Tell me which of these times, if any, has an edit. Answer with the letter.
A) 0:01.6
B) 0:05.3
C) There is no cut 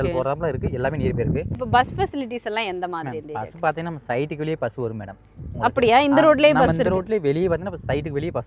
A